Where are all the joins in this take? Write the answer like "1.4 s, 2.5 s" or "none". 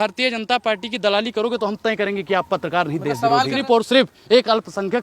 3.6 s